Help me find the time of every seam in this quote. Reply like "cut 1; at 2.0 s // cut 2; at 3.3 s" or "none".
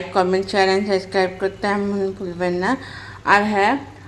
none